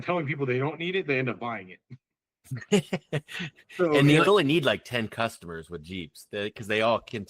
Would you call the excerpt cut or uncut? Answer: cut